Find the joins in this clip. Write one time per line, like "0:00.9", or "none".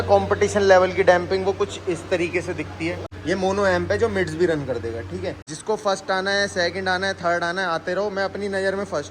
0:03.1
0:05.5